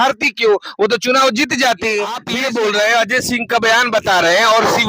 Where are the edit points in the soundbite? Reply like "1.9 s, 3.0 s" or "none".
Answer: 2.3 s